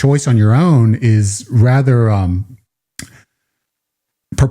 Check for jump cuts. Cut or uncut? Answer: uncut